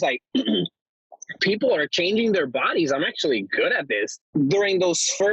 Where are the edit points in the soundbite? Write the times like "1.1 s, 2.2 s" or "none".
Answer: 4.2 s